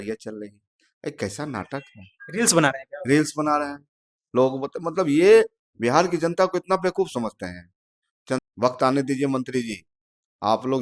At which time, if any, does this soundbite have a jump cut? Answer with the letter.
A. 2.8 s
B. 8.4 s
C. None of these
B